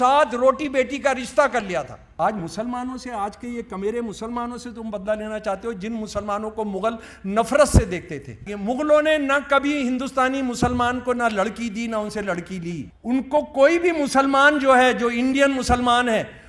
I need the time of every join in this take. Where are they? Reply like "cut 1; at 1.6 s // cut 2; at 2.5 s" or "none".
cut 1; at 2.0 s // cut 2; at 8.5 s // cut 3; at 12.9 s